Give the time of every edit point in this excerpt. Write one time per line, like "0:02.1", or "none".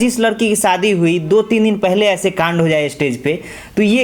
none

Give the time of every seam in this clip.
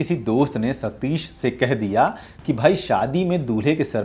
none

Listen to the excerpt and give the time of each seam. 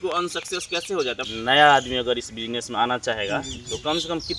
0:01.2

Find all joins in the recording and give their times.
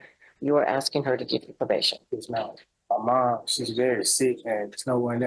0:02.7

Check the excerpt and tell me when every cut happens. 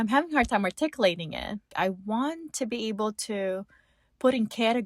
0:01.7

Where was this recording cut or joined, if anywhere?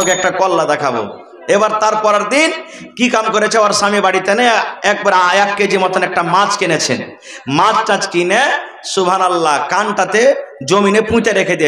none

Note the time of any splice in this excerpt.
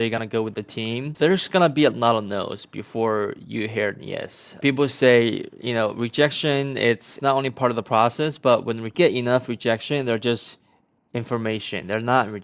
0:01.1
0:04.6
0:07.1
0:08.9

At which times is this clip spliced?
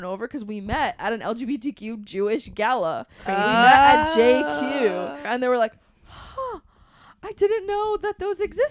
0:05.3

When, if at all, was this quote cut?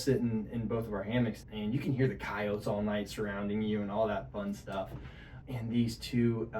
0:01.4

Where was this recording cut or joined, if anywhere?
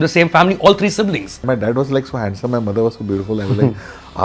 0:01.5

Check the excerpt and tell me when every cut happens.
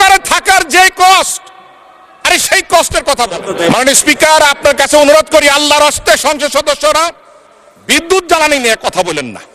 0:03.5

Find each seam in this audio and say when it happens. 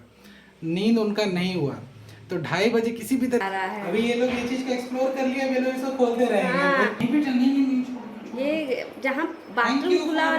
0:03.4
0:06.9

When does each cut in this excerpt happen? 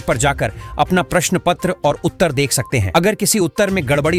none

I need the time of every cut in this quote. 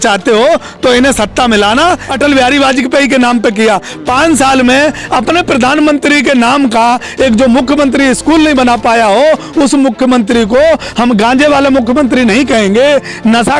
0:02.1

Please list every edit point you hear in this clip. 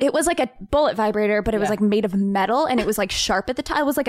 none

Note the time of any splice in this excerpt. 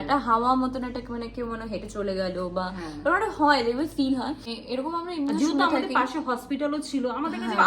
0:04.5

